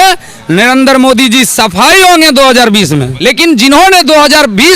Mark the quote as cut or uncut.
cut